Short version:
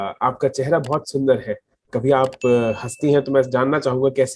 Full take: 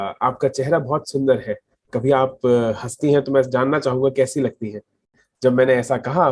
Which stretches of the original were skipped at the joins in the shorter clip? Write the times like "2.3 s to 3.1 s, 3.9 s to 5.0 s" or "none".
none